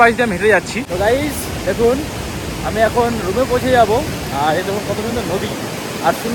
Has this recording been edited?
no; 0 cuts

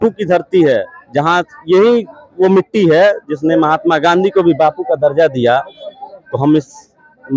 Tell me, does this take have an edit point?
no; 0 cuts

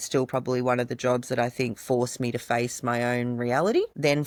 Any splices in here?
no; 0 cuts

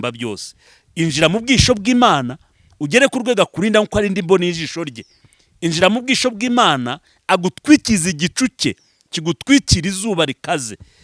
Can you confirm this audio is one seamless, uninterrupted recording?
yes; 0 cuts

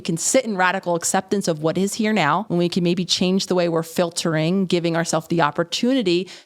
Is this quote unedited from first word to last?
no; 1 cut; at 2.5 s

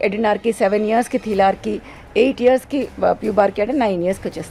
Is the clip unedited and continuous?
yes; 0 cuts

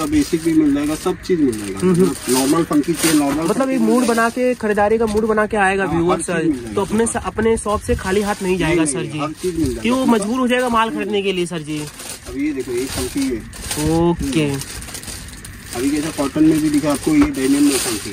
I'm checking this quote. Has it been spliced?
no; 0 cuts

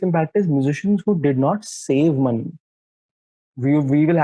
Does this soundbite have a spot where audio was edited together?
yes; 1 cut; at 3.2 s

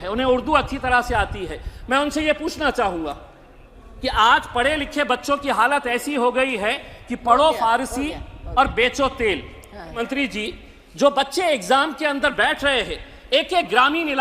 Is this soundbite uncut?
no; 1 cut; at 10.0 s

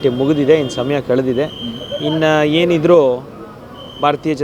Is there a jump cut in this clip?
no; 0 cuts

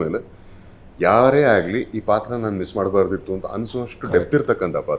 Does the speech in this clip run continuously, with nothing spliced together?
yes; 0 cuts

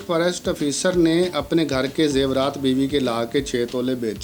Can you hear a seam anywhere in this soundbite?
no; 0 cuts

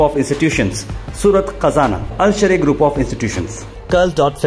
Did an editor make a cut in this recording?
no; 0 cuts

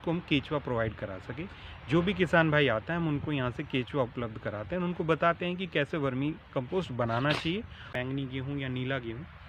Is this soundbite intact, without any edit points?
no; 1 cut; at 7.9 s

